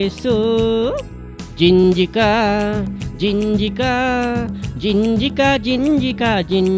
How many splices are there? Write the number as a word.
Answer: zero